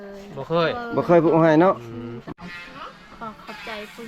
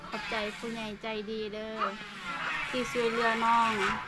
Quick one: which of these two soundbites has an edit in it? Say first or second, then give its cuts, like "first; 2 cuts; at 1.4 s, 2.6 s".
first; 1 cut; at 2.2 s